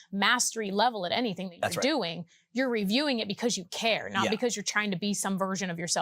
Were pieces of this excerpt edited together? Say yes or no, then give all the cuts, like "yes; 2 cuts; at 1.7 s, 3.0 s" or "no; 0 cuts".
no; 0 cuts